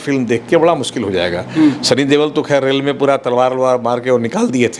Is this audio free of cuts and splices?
yes; 0 cuts

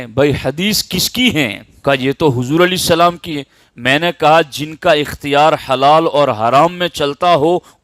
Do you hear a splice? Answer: yes; 1 cut; at 1.7 s

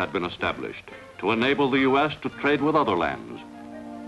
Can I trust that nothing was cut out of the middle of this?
no; 1 cut; at 1.8 s

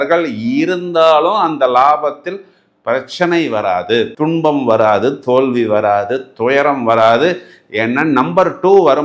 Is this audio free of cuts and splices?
yes; 0 cuts

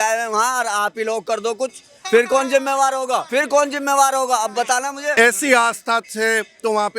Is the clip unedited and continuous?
no; 2 cuts; at 3.3 s, 5.1 s

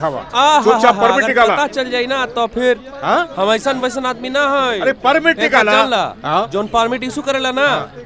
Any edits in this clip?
no; 0 cuts

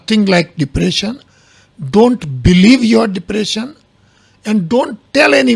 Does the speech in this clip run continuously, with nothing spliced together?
yes; 0 cuts

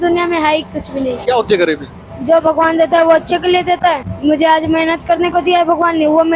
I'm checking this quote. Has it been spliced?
yes; 2 cuts; at 1.2 s, 4.1 s

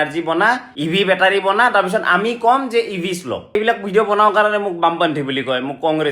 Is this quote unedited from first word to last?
no; 1 cut; at 3.5 s

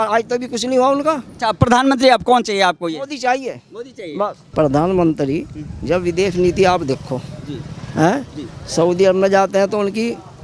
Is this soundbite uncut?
no; 2 cuts; at 1.3 s, 4.4 s

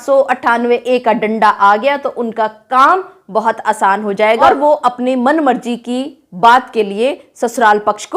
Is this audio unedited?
no; 1 cut; at 4.5 s

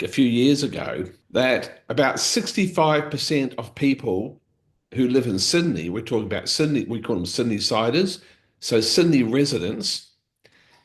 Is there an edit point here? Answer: yes; 2 cuts; at 1.2 s, 1.8 s

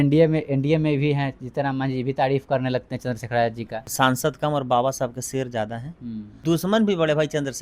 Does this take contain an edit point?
yes; 2 cuts; at 3.8 s, 6.3 s

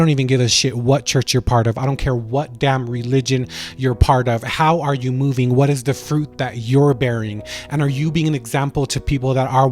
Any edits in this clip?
no; 0 cuts

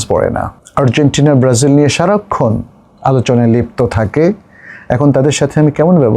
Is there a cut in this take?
no; 0 cuts

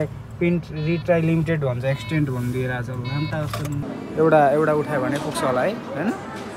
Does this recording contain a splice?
yes; 1 cut; at 3.8 s

